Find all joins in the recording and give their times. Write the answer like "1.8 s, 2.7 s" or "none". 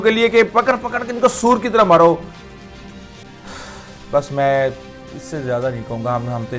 none